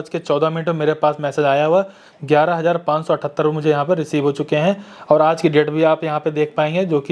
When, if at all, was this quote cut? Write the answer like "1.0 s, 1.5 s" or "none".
none